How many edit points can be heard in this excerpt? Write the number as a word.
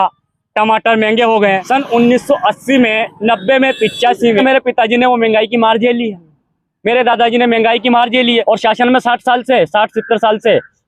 three